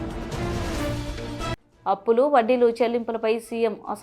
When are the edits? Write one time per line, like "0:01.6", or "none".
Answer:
0:01.2